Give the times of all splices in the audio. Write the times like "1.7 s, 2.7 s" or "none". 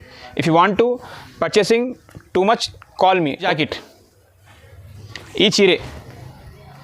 3.5 s